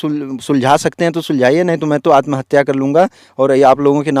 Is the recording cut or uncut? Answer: uncut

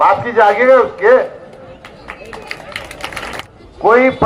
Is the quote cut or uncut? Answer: cut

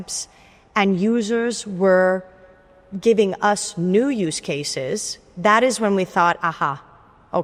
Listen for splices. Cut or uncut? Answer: uncut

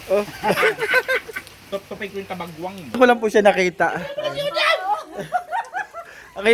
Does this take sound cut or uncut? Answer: cut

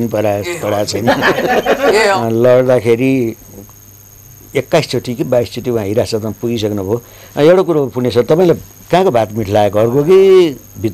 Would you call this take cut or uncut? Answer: cut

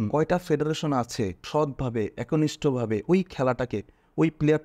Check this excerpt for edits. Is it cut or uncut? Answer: cut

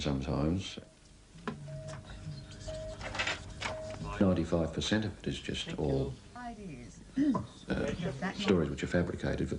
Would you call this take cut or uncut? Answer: cut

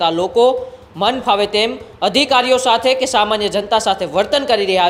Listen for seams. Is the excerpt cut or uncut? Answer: uncut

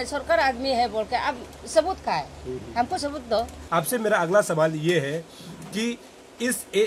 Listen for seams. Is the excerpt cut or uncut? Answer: uncut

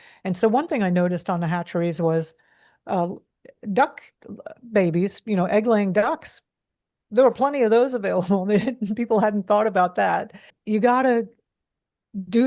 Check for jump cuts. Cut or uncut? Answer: cut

